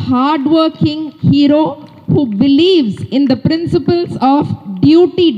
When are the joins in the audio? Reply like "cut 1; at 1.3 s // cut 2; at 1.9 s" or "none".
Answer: none